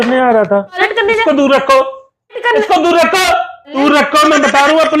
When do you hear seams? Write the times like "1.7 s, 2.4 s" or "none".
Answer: 0.8 s, 2.4 s, 3.8 s